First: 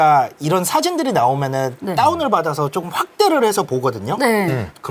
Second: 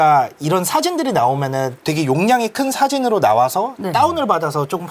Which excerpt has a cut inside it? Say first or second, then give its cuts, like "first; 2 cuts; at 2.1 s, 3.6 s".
first; 1 cut; at 1.8 s